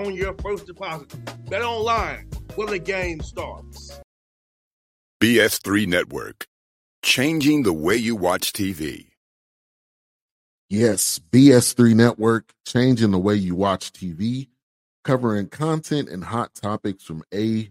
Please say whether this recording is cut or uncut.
cut